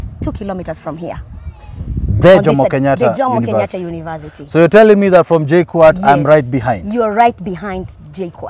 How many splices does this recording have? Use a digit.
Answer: 0